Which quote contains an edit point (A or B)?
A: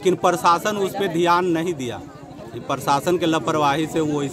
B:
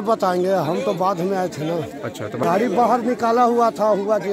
B